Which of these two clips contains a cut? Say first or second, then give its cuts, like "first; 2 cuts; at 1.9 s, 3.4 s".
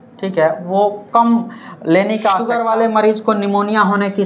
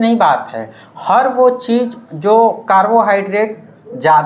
first; 1 cut; at 2.5 s